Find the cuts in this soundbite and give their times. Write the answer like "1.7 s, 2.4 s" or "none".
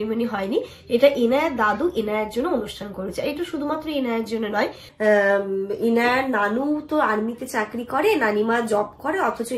4.8 s